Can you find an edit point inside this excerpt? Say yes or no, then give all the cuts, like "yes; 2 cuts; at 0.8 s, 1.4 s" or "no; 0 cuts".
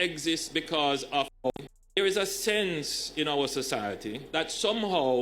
yes; 1 cut; at 1.3 s